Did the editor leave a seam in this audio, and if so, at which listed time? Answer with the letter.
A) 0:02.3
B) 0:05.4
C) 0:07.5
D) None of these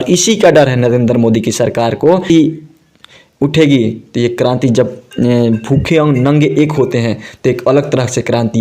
A